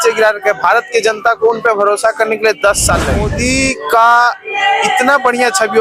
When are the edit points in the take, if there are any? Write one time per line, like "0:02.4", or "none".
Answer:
0:03.3